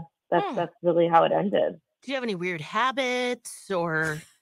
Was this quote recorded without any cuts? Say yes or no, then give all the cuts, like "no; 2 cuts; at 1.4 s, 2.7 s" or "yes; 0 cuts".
no; 1 cut; at 1.9 s